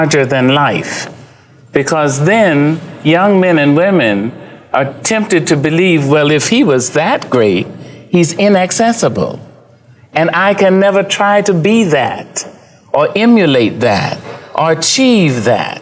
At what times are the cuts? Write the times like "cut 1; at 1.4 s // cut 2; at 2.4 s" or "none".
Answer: none